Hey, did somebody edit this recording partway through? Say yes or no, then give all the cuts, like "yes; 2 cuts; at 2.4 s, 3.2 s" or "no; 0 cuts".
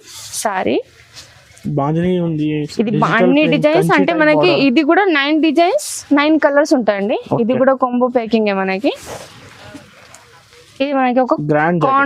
no; 0 cuts